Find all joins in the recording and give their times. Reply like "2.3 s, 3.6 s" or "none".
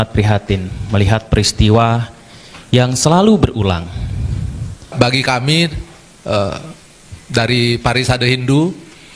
4.9 s